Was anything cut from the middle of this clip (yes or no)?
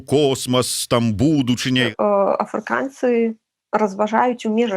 yes